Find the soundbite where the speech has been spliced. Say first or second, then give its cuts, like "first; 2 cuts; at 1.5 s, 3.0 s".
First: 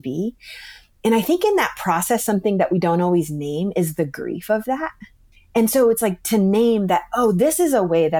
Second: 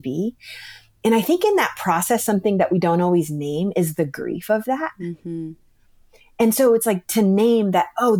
first; 1 cut; at 5.1 s